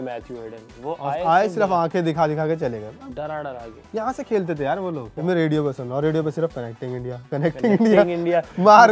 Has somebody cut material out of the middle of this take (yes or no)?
yes